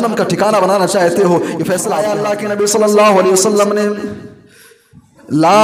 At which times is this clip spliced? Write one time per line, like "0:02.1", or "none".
0:02.1